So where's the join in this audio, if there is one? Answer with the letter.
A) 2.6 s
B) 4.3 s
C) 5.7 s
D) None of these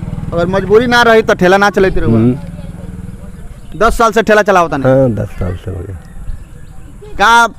D